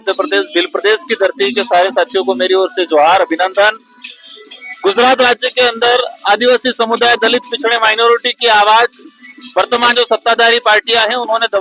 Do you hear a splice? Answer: no; 0 cuts

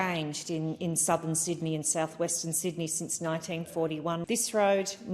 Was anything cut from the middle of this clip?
yes; 1 cut; at 4.2 s

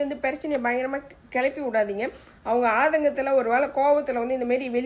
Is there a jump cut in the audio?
no; 0 cuts

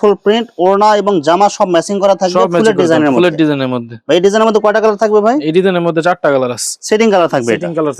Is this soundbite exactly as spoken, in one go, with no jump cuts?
yes; 0 cuts

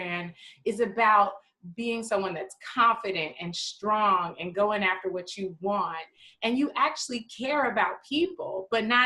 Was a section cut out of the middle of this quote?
no; 0 cuts

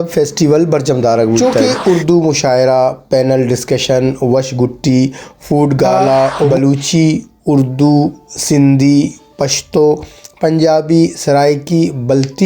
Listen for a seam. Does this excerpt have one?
yes; 2 cuts; at 1.4 s, 6.5 s

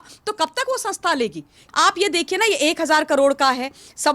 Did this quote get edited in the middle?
yes; 1 cut; at 1.6 s

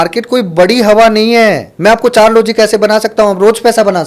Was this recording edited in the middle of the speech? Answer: yes; 1 cut; at 1.7 s

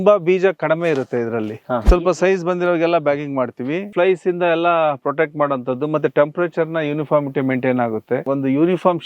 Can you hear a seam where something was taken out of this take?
yes; 3 cuts; at 1.8 s, 3.9 s, 8.2 s

